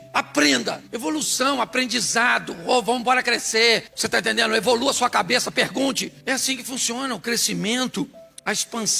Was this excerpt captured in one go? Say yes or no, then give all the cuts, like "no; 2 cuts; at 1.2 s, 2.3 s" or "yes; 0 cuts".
yes; 0 cuts